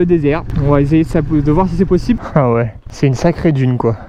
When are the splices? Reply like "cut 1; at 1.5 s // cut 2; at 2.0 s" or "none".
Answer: cut 1; at 2.2 s